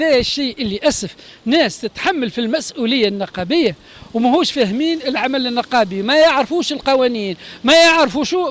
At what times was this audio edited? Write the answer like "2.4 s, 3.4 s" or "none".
none